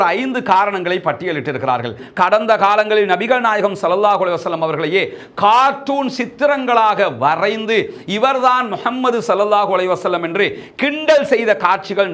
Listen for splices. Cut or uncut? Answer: cut